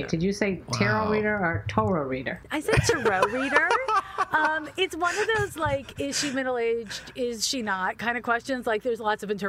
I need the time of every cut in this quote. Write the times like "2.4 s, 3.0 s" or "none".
2.4 s